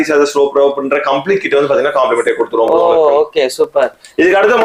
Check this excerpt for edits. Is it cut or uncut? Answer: uncut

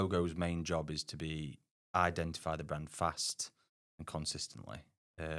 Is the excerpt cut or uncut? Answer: uncut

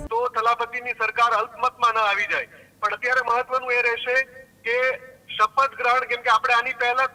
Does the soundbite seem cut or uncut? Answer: uncut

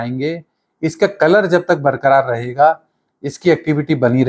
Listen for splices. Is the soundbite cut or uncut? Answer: uncut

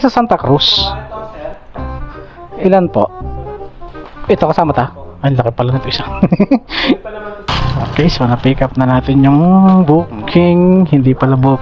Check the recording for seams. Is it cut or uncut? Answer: cut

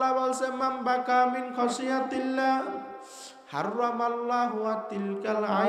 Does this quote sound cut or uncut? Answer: uncut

